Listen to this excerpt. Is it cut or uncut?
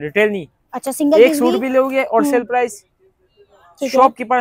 uncut